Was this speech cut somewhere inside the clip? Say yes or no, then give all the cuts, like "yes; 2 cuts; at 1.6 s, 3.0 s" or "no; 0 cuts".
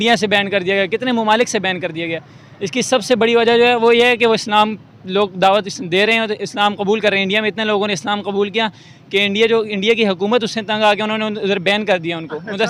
no; 0 cuts